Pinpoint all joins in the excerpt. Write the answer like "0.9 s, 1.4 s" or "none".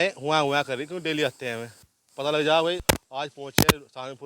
2.8 s